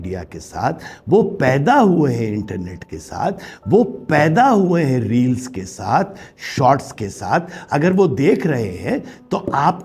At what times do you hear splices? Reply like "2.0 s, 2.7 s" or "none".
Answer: none